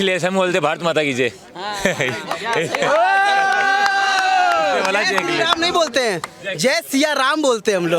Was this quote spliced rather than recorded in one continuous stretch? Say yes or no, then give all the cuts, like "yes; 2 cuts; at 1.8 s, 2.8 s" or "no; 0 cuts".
no; 0 cuts